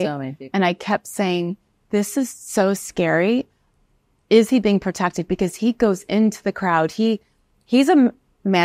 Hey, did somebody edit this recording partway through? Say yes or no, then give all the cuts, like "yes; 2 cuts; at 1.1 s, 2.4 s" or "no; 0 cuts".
no; 0 cuts